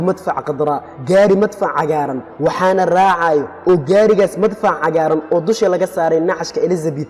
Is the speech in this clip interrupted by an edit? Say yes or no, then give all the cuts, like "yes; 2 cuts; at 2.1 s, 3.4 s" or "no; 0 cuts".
no; 0 cuts